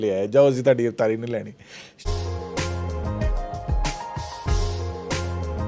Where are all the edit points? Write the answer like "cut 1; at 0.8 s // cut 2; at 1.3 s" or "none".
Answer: cut 1; at 2.0 s